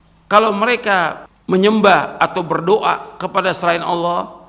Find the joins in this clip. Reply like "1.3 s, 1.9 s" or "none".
1.3 s